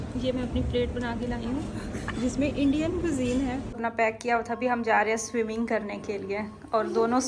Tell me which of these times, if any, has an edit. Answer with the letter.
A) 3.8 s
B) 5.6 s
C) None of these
A